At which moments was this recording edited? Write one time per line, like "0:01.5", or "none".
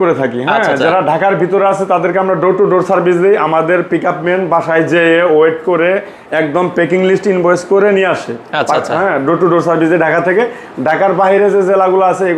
none